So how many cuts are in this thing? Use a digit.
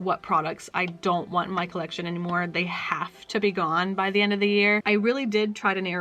1